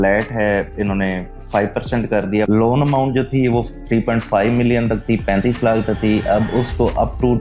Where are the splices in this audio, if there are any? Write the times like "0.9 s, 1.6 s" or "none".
2.4 s